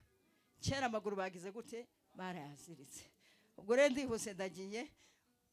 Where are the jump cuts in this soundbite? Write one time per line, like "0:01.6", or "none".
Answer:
none

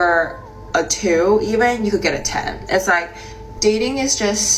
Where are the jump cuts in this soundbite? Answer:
none

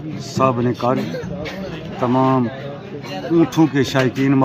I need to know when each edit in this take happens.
none

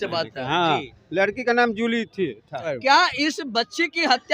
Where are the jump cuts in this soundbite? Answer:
0:02.7

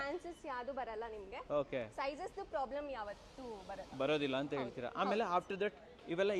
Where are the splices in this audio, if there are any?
none

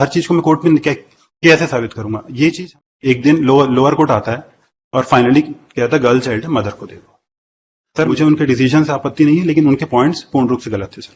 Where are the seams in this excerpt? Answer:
0:02.6
0:08.1

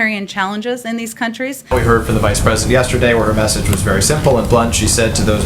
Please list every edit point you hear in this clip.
0:01.7

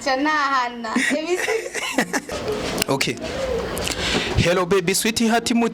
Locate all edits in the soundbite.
0:02.3

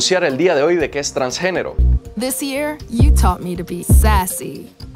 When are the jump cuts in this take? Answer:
0:01.7

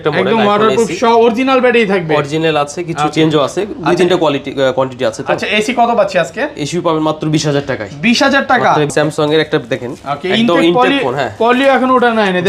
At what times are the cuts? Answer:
0:08.9

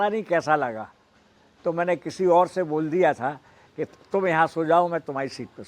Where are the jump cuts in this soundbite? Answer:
none

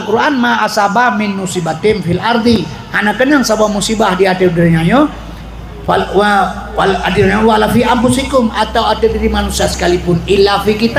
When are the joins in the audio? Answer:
none

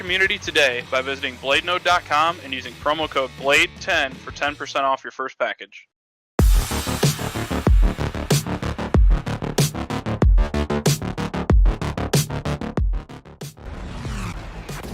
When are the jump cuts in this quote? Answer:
0:06.3

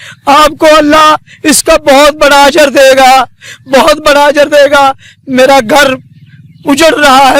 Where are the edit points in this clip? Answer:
none

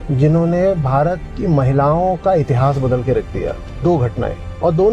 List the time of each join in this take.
0:01.3

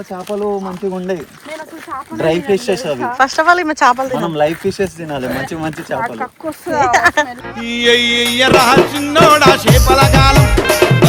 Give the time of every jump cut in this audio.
none

